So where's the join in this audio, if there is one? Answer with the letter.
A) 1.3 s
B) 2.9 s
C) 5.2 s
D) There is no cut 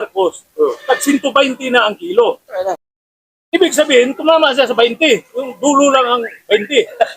B